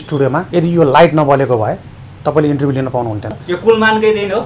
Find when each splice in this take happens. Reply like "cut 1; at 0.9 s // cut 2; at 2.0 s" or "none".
cut 1; at 3.4 s